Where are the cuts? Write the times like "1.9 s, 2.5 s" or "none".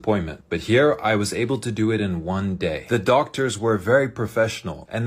none